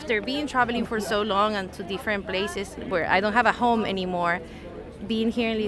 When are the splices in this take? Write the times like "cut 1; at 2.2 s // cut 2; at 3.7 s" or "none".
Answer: cut 1; at 2.8 s